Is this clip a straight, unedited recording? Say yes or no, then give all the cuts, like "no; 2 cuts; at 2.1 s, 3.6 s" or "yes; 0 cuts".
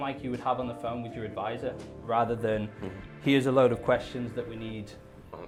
yes; 0 cuts